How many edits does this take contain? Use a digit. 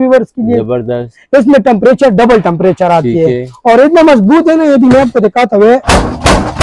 0